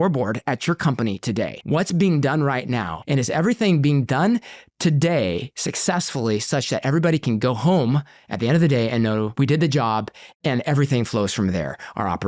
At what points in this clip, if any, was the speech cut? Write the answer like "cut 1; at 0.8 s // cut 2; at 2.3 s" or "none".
cut 1; at 1.6 s // cut 2; at 2.9 s // cut 3; at 9.3 s